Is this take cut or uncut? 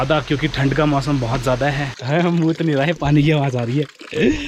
cut